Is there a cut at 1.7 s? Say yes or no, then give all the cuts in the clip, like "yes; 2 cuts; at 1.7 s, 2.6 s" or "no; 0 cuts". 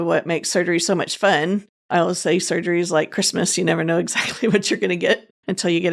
yes; 1 cut; at 1.7 s